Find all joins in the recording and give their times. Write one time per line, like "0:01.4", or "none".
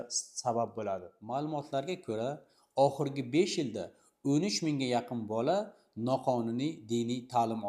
0:01.1